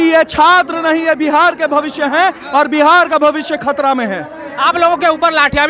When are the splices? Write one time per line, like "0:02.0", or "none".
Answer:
none